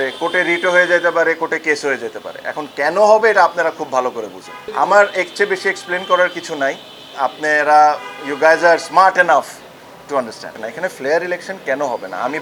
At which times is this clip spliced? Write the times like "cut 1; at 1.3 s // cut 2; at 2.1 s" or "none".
none